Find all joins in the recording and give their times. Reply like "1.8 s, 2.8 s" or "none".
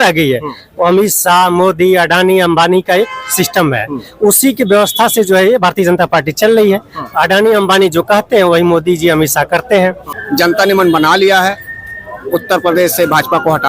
10.1 s